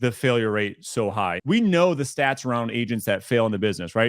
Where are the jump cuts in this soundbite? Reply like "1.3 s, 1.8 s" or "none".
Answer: 1.4 s